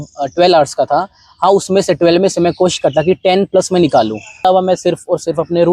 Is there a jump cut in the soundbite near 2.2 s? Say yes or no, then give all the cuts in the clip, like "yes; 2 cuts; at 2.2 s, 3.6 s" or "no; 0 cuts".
no; 1 cut; at 4.4 s